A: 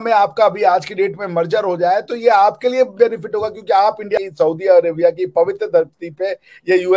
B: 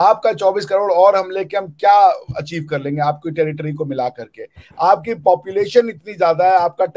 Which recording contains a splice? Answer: A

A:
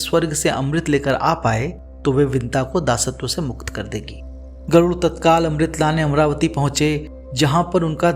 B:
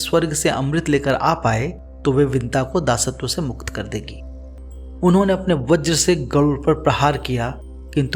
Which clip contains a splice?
B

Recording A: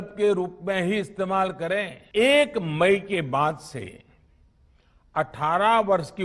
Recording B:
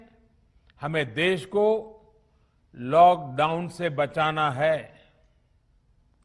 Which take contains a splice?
A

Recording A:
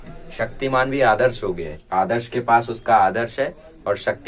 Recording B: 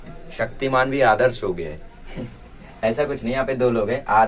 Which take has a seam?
A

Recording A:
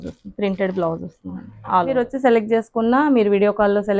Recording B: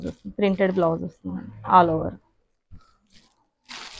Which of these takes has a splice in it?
A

